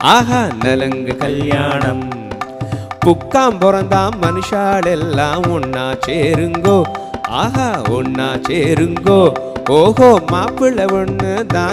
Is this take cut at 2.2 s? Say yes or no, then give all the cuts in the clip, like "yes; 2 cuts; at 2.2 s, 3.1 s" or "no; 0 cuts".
no; 0 cuts